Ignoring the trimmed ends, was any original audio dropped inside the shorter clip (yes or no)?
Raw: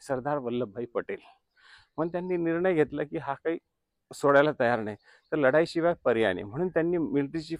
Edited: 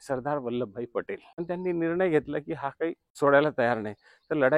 yes